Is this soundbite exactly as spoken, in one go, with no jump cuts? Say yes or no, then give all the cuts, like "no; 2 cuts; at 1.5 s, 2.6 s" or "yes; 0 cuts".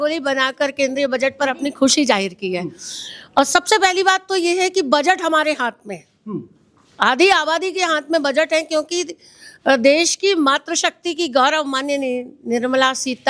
yes; 0 cuts